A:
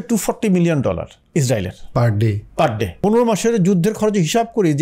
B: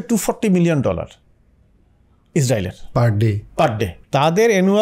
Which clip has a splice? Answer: A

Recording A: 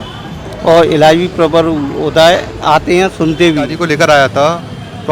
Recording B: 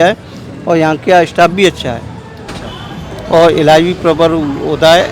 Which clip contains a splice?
A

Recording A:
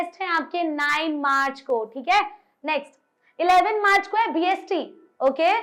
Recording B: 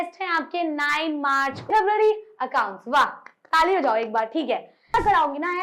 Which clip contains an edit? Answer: B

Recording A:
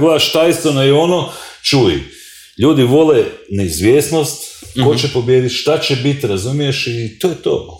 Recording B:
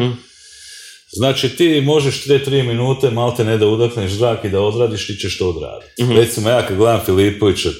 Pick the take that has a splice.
B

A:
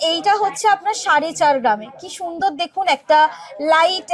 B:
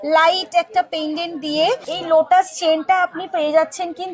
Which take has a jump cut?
B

